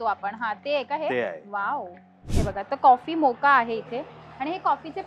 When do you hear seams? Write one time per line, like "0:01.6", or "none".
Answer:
0:02.5